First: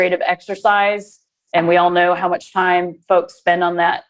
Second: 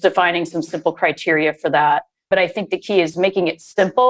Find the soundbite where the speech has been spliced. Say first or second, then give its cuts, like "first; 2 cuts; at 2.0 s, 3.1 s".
second; 2 cuts; at 2.2 s, 3.1 s